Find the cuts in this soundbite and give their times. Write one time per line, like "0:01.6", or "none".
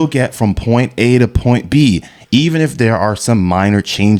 none